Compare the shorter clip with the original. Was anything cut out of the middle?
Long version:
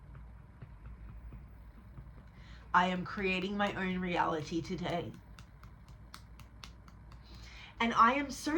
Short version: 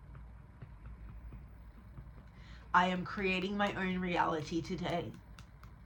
no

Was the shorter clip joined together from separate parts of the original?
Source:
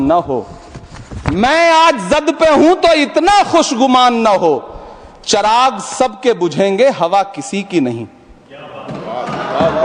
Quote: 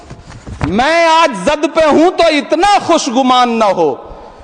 no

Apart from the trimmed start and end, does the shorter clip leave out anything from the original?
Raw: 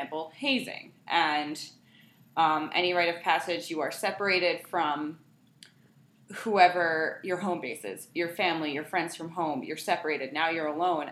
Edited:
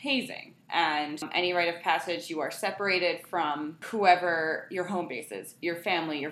yes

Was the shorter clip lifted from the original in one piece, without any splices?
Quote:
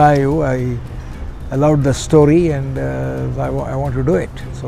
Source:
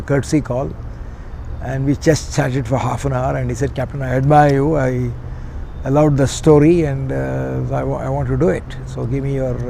yes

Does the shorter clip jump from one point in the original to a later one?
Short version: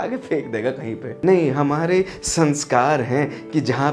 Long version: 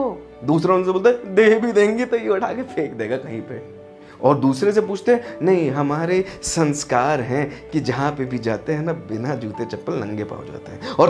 yes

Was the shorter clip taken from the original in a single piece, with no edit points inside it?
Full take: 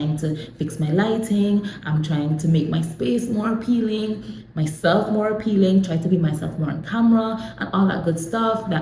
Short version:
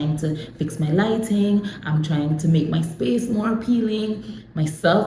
yes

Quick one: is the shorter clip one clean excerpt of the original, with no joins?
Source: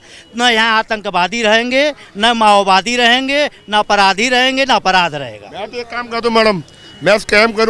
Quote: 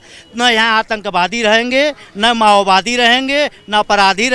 yes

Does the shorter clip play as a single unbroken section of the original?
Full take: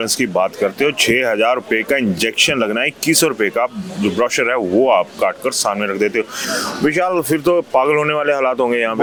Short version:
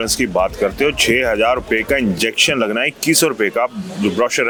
yes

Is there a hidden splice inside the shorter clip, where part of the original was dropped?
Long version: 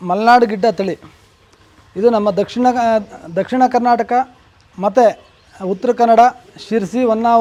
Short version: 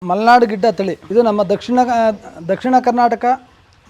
yes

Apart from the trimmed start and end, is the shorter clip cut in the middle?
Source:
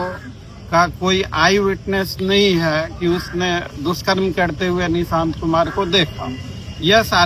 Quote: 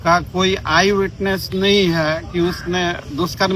no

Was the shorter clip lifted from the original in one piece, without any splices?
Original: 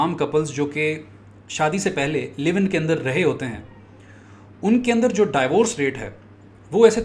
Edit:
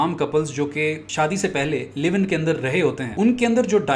no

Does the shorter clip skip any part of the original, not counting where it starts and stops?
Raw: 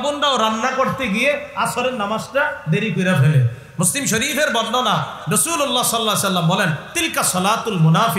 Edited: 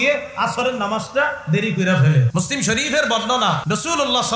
yes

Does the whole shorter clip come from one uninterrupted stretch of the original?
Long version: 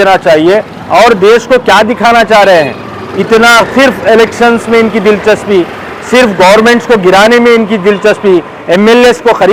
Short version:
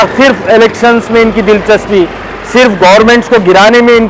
yes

